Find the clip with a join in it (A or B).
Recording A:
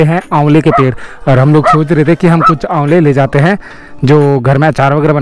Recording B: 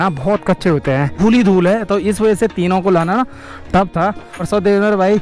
B